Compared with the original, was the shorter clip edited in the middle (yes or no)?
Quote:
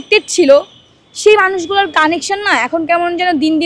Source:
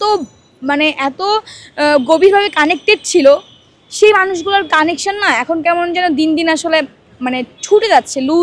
no